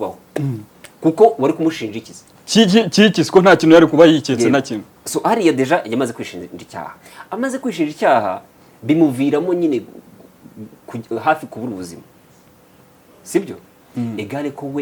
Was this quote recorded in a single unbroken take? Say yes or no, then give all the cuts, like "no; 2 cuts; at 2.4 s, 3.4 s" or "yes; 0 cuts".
yes; 0 cuts